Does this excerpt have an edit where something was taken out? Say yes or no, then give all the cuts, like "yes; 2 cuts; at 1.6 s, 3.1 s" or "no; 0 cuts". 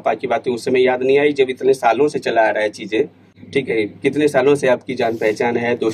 no; 0 cuts